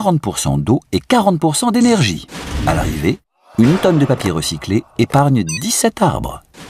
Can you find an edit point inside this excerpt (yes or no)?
yes